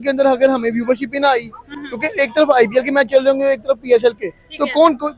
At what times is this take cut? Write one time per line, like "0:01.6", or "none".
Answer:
none

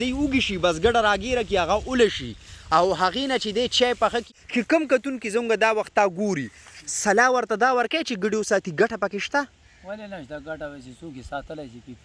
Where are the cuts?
0:04.2

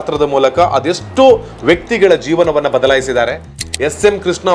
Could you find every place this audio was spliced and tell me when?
0:03.5

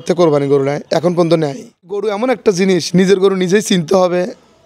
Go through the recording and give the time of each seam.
0:02.0

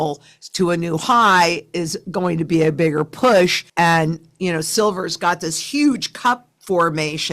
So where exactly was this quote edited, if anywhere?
none

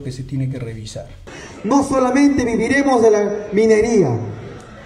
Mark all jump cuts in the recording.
0:01.4

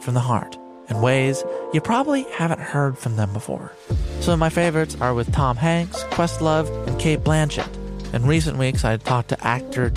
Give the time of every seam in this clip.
none

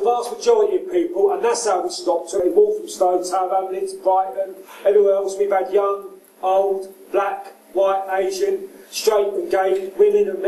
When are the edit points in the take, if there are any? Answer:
0:02.4

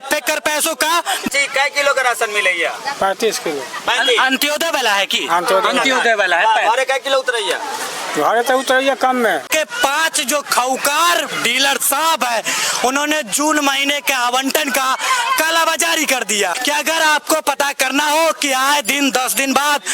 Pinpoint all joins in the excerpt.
0:01.3
0:09.5
0:16.5

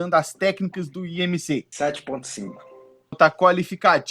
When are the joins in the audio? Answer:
0:01.7
0:03.2

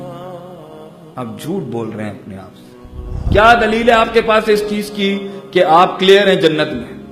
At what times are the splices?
0:03.2

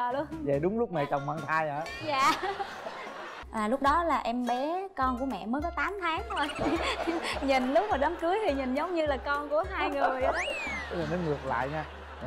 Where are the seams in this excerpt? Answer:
0:03.4
0:10.8

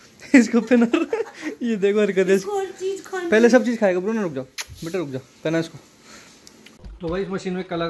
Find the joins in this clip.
0:06.7

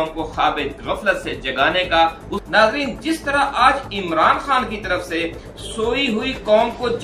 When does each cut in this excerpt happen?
0:02.4

